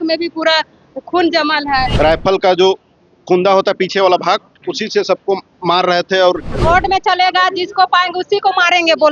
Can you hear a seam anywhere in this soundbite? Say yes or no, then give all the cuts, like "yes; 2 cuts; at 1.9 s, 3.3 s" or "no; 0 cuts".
yes; 2 cuts; at 1.9 s, 6.5 s